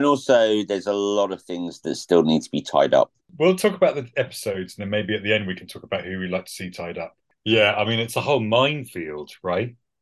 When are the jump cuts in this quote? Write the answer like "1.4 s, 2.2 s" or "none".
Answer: 3.2 s, 7.3 s